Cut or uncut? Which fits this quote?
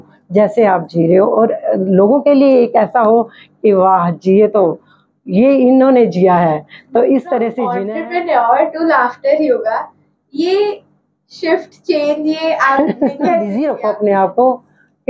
cut